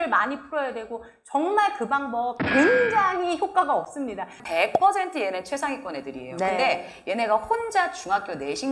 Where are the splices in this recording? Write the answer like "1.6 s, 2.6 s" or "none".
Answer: 4.4 s